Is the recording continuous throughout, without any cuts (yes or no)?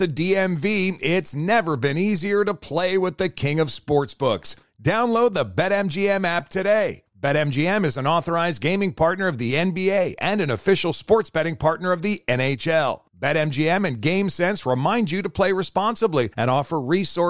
yes